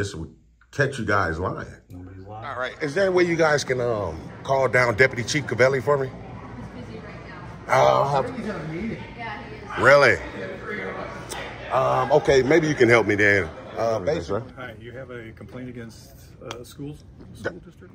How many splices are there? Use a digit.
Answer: 2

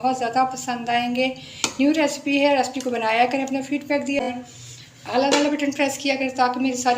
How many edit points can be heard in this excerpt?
1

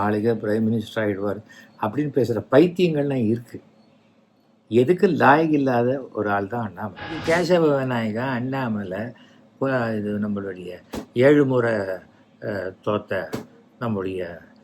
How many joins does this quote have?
1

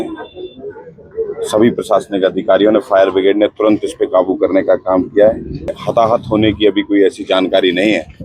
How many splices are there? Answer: 1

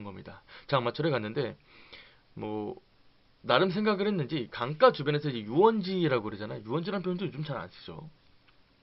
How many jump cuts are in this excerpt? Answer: 0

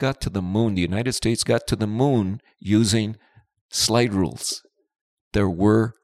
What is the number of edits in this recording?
1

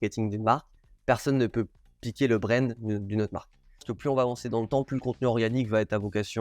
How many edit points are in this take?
1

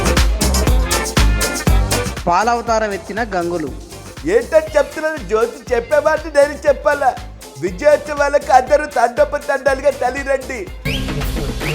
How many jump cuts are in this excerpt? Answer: 1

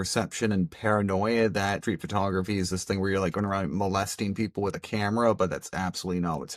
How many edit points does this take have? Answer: 0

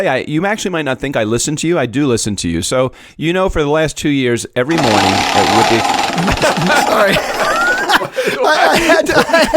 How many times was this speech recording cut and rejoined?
1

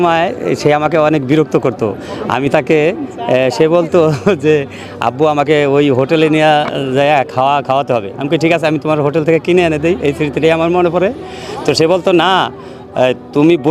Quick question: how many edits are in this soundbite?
0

